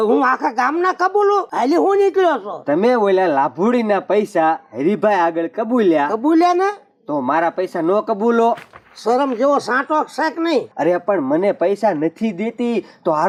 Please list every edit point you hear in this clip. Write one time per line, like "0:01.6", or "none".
none